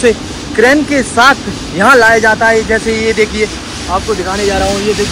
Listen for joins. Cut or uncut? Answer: uncut